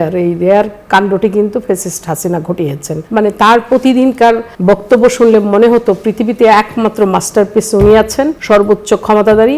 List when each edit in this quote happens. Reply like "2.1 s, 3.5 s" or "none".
2.9 s, 4.5 s, 8.4 s